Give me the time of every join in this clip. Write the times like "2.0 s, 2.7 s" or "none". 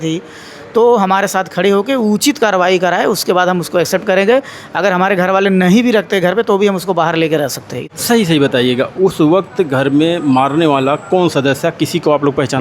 7.7 s